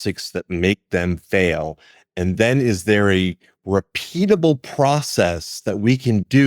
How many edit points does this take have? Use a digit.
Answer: 0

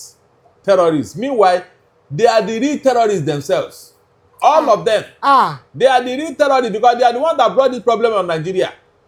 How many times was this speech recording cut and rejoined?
0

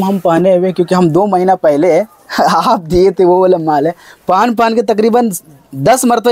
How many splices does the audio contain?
0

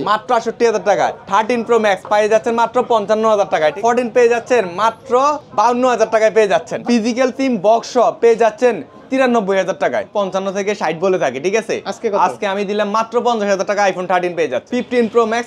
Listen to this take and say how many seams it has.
6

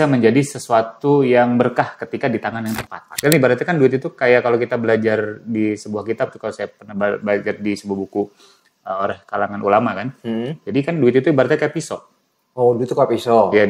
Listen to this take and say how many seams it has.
1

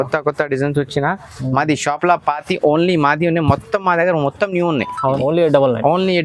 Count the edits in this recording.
0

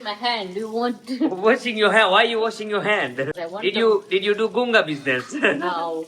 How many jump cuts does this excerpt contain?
0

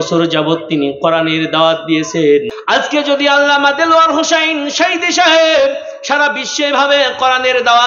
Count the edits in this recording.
1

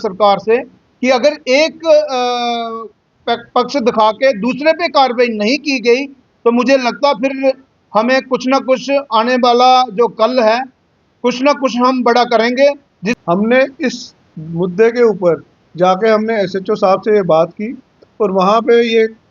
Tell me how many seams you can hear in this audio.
1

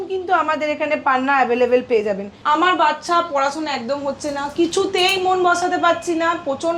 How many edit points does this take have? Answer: 1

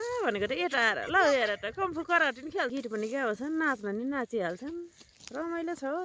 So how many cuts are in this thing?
1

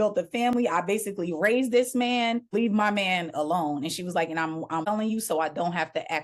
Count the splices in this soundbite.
2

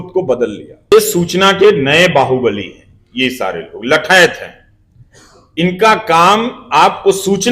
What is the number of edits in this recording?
1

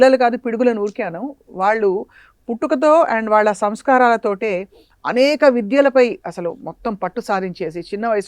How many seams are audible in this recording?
0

